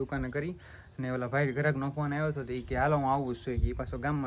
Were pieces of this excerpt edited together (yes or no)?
no